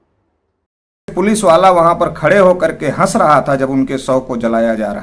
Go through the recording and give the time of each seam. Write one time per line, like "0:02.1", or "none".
0:01.1